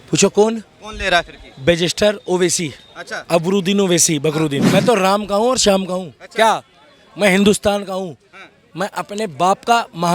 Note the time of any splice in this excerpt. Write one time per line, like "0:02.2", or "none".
0:04.6

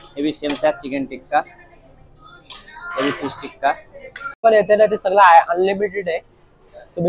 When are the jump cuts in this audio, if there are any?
0:04.4

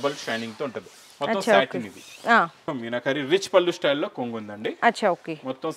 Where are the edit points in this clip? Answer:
0:02.6

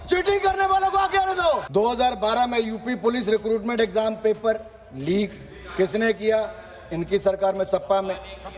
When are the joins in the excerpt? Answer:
0:01.6

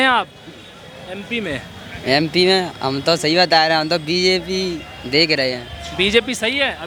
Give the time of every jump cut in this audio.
none

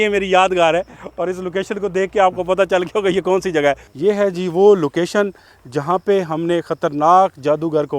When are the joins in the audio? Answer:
0:03.9

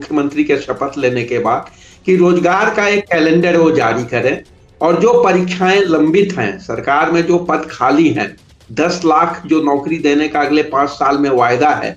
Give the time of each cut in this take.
none

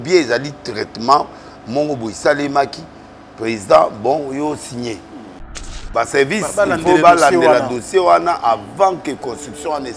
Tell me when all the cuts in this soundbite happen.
0:05.8

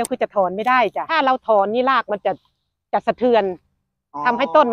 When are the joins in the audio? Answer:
0:01.0

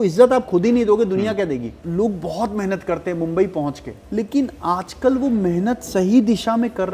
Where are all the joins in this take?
0:01.8
0:03.9

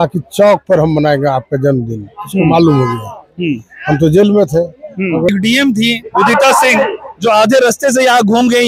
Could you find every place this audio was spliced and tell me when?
0:05.3

